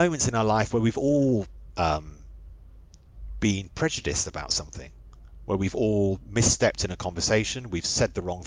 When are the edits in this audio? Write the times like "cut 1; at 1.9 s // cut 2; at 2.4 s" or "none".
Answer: none